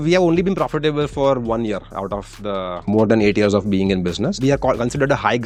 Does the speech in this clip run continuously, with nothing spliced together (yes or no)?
yes